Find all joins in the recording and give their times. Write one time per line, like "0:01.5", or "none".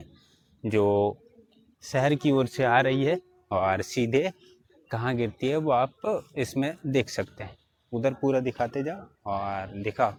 none